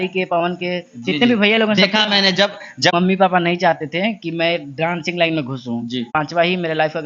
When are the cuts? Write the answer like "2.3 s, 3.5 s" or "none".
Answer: 2.9 s, 6.1 s